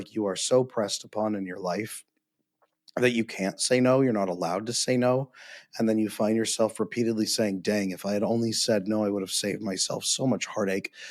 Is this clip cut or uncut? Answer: uncut